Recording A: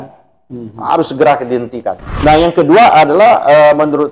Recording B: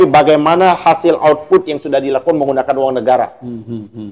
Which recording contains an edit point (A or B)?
A